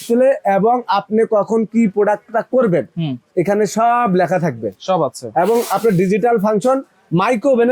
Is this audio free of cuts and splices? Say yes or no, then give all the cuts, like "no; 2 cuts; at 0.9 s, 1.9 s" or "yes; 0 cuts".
yes; 0 cuts